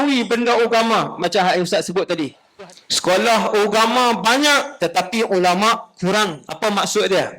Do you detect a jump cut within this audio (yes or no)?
yes